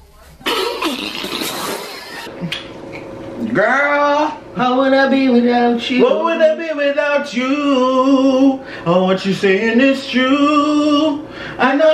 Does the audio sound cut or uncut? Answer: cut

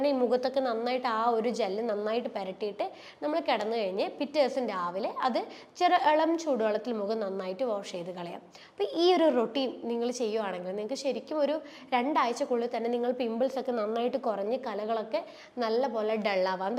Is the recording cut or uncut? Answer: uncut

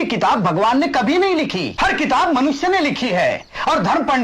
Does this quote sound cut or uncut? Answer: cut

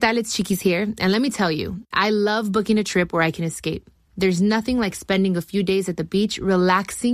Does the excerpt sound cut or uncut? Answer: uncut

